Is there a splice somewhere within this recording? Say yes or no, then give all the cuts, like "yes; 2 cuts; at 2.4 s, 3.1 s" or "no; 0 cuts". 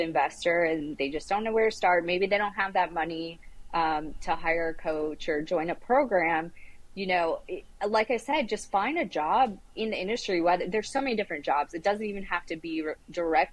no; 0 cuts